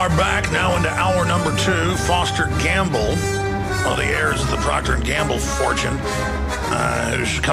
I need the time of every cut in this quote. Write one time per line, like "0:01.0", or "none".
0:02.9